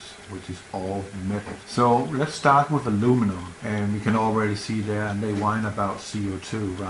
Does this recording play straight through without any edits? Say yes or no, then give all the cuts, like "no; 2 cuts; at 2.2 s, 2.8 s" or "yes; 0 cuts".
no; 1 cut; at 1.6 s